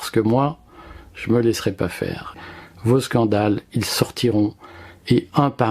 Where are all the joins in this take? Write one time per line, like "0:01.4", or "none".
0:02.4